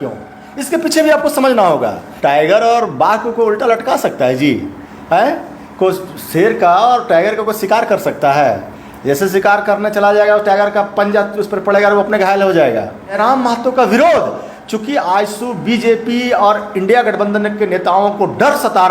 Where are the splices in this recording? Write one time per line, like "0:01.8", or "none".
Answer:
0:02.0
0:13.1